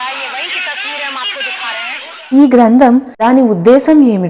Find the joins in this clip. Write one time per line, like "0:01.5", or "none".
0:02.1
0:03.1